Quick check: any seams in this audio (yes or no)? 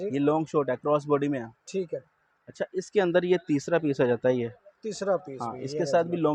no